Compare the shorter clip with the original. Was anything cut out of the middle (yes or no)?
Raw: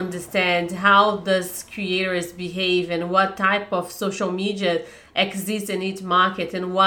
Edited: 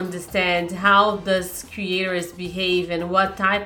no